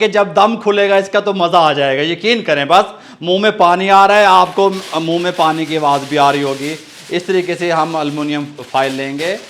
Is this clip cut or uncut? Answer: uncut